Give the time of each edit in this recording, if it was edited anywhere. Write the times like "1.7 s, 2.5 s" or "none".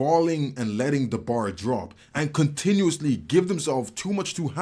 2.0 s

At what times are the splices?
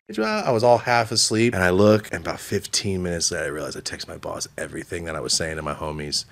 1.6 s, 2.1 s

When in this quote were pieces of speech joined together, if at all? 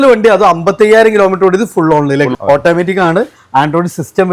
2.3 s

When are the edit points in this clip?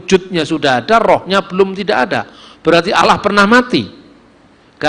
none

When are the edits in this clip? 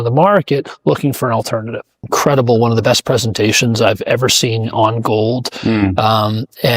1.9 s

